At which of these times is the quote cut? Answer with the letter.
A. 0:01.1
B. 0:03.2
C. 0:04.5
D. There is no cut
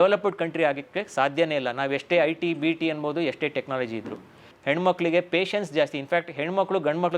C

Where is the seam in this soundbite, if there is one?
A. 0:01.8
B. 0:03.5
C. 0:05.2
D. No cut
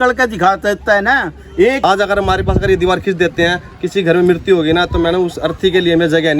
A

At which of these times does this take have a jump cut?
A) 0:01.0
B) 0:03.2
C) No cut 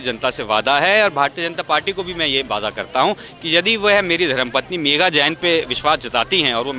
C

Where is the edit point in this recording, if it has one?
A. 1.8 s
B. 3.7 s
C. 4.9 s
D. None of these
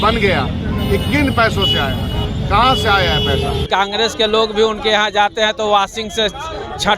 B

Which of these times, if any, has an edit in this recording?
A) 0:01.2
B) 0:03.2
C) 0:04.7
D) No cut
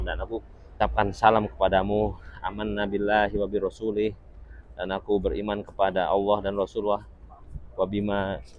D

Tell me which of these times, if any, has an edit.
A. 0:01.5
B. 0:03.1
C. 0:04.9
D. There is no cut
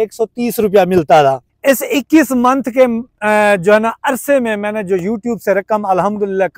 A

